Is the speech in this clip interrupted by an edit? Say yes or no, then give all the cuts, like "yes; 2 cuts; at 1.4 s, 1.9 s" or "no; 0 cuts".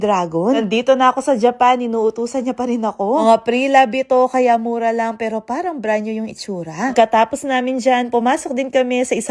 no; 0 cuts